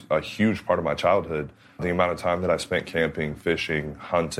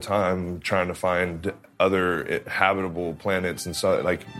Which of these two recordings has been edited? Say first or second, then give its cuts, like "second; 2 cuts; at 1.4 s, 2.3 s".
first; 1 cut; at 1.8 s